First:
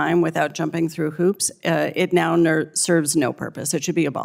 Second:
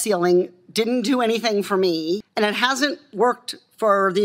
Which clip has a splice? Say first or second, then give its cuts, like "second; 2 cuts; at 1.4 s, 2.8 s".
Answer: second; 1 cut; at 2.3 s